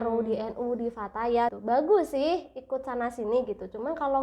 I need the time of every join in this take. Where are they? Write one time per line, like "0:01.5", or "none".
0:01.6